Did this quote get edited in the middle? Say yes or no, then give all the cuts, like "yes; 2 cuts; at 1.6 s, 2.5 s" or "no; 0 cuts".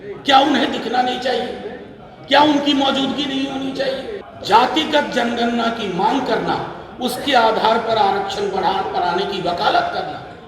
yes; 1 cut; at 4.3 s